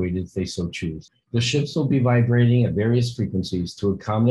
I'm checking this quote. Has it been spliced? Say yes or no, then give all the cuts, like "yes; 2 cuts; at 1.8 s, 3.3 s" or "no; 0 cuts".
yes; 1 cut; at 1.1 s